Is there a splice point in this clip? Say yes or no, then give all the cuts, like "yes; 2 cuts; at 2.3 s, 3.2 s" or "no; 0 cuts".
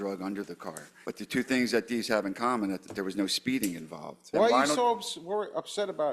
yes; 2 cuts; at 1.0 s, 4.3 s